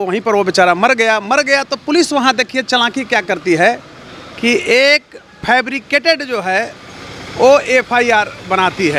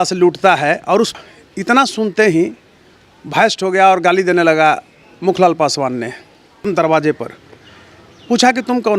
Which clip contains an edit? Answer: second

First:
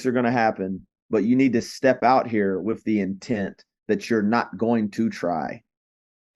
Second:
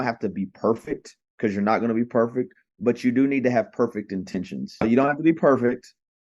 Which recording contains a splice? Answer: second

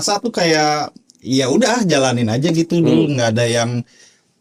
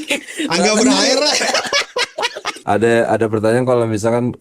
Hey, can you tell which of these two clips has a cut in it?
second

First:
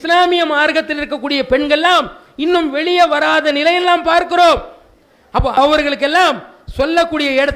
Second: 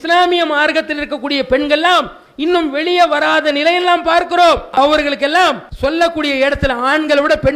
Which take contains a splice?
second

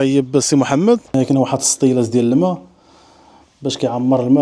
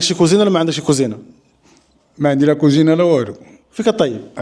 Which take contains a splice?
first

